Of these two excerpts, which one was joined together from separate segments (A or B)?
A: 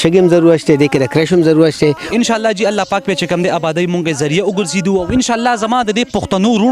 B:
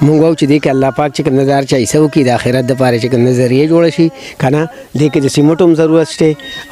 A